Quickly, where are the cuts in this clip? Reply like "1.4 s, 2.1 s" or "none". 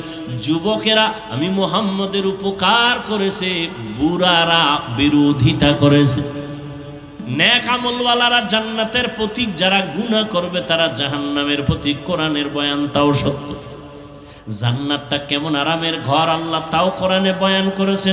7.2 s